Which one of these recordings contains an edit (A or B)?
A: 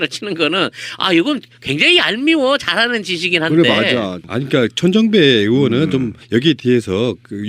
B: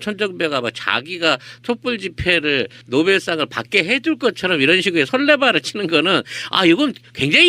A